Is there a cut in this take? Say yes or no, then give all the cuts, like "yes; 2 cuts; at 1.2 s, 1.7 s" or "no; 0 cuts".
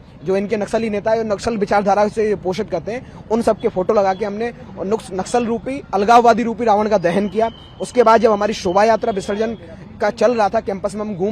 no; 0 cuts